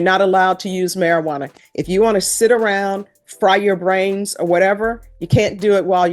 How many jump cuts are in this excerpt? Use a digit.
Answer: 0